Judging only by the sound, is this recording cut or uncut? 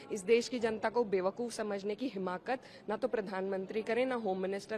uncut